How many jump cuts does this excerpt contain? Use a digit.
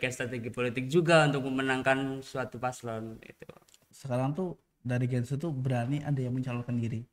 1